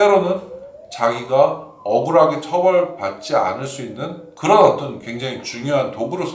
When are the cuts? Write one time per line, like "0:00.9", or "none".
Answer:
none